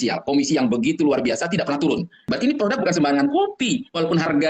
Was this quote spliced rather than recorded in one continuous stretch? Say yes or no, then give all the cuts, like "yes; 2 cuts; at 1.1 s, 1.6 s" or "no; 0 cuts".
yes; 1 cut; at 2.2 s